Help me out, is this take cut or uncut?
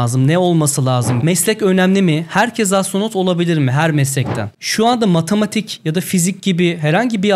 cut